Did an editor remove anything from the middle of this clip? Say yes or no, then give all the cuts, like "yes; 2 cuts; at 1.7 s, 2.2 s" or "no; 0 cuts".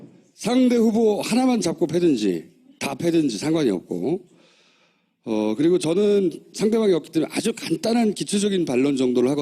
no; 0 cuts